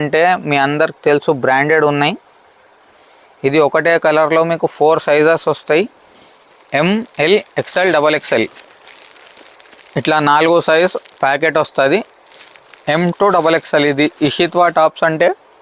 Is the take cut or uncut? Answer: uncut